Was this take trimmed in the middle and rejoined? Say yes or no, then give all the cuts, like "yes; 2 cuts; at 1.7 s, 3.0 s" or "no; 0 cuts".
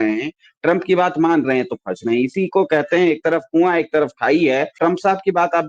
yes; 1 cut; at 4.8 s